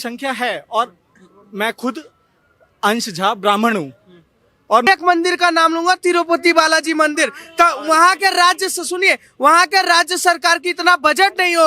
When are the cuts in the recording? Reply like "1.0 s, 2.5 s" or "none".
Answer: 4.9 s

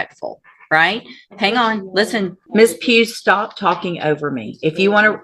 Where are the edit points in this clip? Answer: 2.4 s

